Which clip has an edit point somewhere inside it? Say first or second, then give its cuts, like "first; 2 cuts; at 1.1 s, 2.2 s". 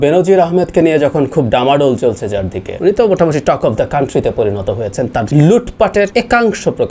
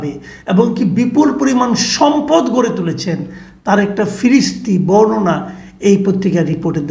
first; 3 cuts; at 2.6 s, 5.3 s, 6.1 s